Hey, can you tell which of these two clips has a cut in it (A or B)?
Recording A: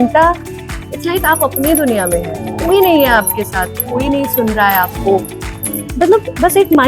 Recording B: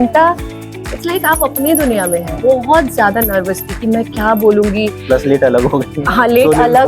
B